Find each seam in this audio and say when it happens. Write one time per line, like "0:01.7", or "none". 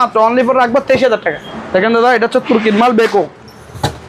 0:01.5